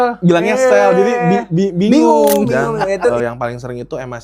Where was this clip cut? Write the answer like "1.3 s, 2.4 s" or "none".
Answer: 3.1 s